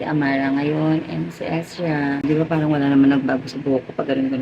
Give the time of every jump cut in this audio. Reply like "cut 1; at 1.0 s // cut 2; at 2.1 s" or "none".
cut 1; at 2.2 s